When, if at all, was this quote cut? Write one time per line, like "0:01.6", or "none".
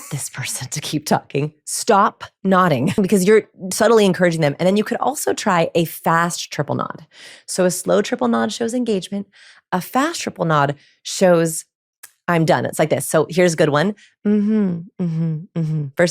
0:03.0